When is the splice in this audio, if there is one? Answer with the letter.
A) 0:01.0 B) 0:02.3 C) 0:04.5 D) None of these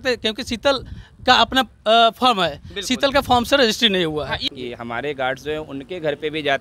C